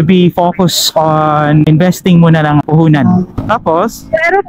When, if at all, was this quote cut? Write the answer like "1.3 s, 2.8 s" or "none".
1.6 s, 2.6 s, 3.4 s